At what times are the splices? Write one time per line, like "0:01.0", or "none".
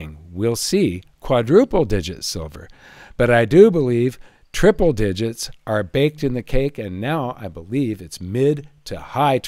none